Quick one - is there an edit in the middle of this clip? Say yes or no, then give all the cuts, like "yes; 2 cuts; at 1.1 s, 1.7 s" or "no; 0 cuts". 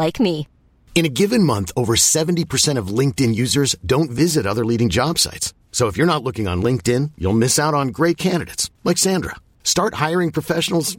no; 0 cuts